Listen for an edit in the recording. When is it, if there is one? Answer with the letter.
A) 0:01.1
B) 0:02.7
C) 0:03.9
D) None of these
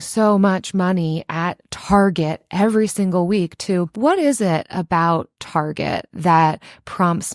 C